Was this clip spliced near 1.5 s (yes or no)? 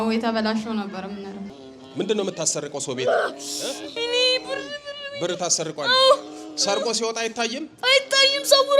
yes